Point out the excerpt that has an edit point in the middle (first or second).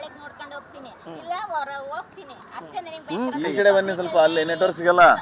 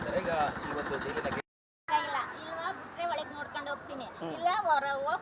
second